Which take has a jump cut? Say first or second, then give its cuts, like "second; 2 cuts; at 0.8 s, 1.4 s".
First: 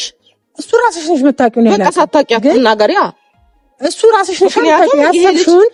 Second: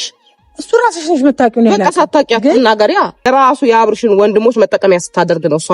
second; 1 cut; at 3.3 s